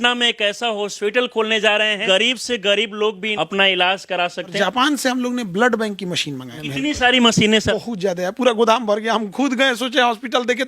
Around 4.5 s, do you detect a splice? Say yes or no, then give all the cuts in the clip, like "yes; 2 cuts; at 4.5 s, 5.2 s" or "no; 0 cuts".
yes; 5 cuts; at 2.0 s, 3.3 s, 4.5 s, 6.5 s, 7.7 s